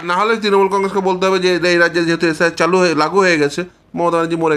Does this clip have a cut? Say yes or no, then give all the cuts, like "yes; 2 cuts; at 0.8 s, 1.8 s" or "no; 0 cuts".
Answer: no; 0 cuts